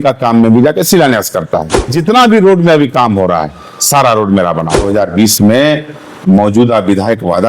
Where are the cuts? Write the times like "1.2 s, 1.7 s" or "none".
1.9 s, 4.8 s

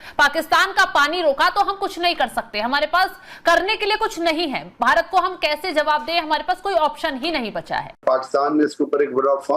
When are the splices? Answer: 8.0 s

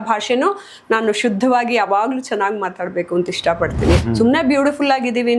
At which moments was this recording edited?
4.1 s

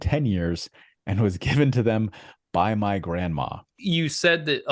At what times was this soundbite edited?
3.7 s

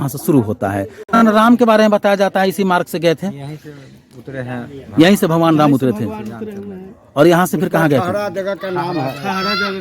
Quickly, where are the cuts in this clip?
1.2 s

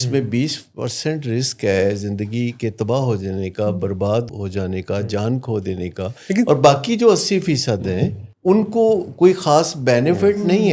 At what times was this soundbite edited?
4.3 s, 8.2 s

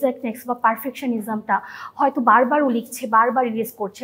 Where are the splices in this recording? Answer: none

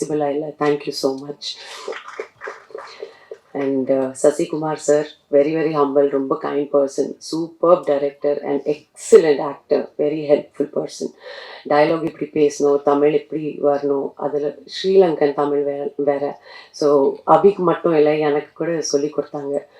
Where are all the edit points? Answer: none

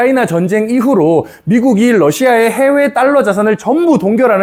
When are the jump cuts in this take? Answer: none

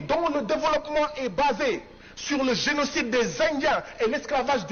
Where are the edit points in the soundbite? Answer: none

